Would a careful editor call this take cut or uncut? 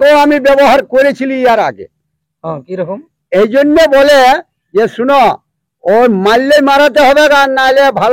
uncut